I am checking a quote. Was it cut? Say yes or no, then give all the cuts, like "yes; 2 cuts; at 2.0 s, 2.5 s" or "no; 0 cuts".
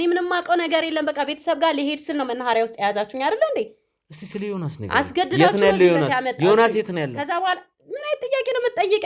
no; 0 cuts